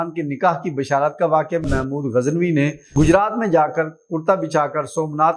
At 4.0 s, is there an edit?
no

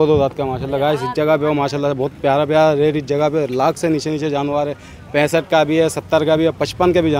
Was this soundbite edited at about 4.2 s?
no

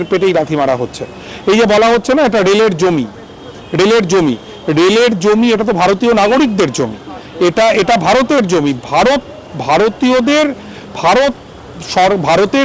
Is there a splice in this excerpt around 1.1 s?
no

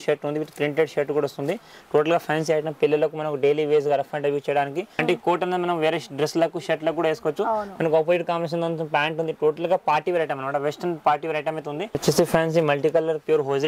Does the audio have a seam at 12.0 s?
yes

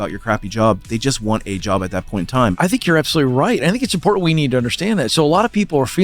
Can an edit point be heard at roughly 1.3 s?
no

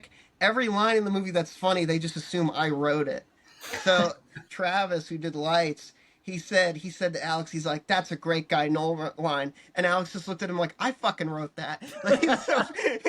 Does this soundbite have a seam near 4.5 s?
yes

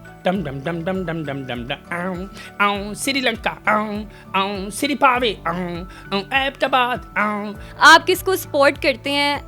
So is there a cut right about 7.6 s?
yes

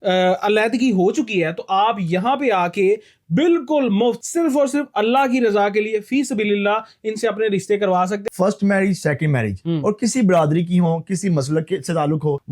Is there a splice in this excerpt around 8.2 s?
yes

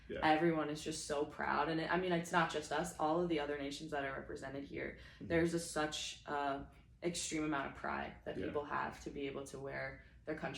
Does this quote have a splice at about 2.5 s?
yes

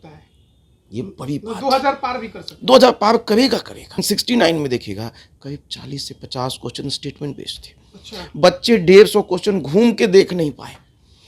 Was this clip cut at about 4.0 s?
yes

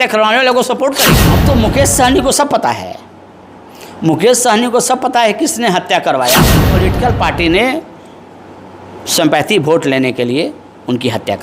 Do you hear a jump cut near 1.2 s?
yes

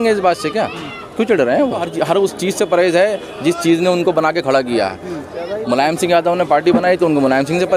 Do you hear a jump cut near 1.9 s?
yes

